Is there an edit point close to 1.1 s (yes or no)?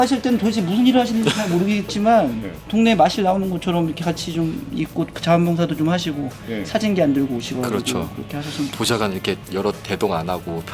no